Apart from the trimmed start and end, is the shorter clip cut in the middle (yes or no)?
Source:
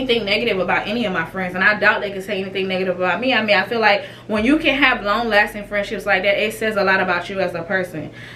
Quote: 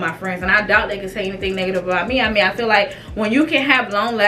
no